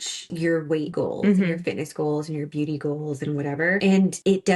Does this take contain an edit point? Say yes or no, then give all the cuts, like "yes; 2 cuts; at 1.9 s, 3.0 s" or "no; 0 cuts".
no; 0 cuts